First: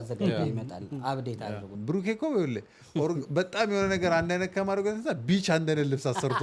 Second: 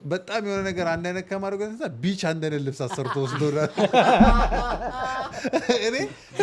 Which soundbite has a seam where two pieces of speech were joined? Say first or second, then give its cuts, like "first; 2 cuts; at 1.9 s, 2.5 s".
first; 1 cut; at 1.7 s